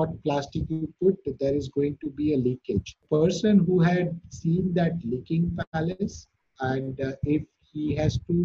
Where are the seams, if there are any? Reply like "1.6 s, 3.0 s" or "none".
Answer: 3.0 s